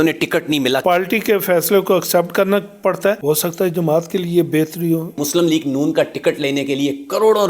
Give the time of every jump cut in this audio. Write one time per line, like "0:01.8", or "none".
0:00.8
0:03.2
0:05.2